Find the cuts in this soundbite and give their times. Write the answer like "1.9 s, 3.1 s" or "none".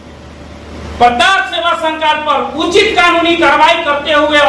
none